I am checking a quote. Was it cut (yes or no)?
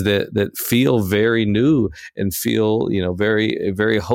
no